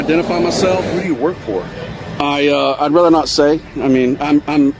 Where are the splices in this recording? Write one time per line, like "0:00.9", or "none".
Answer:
0:00.9